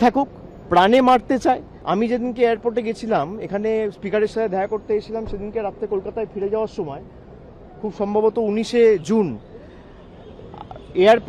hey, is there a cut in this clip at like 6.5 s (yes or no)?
no